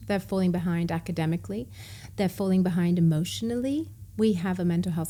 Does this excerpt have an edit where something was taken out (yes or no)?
no